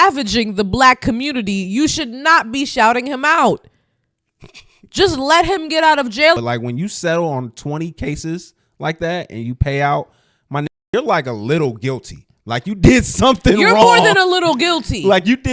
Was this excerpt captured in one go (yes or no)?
no